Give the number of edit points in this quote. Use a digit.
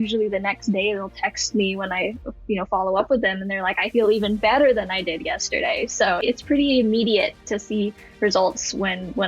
1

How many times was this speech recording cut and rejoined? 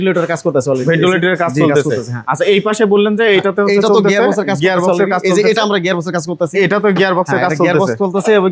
0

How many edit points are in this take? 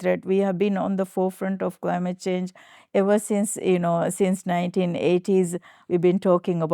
0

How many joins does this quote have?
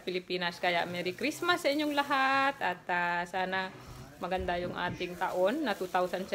1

